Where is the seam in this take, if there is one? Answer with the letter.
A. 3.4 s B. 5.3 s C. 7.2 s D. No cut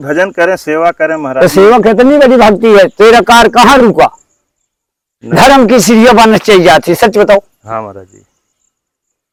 D